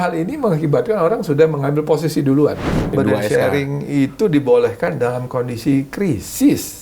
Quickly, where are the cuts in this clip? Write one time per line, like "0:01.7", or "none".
0:02.9